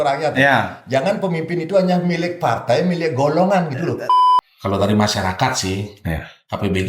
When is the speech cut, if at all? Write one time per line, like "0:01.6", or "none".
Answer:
0:04.1